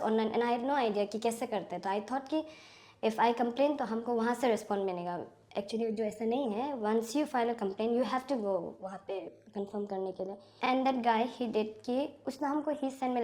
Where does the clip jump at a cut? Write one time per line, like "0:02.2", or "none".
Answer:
0:10.5